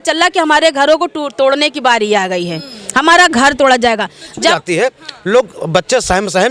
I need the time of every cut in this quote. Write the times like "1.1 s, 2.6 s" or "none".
4.6 s